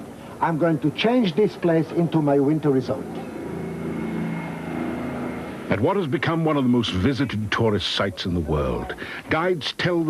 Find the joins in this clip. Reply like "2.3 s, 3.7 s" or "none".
8.5 s